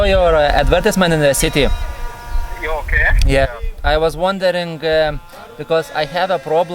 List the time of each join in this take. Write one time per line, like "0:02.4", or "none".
0:03.5